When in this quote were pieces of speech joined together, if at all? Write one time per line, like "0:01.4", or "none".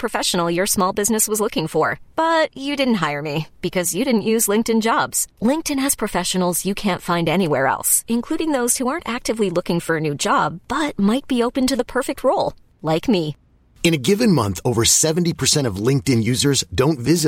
none